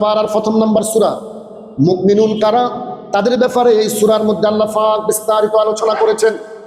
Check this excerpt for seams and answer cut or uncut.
uncut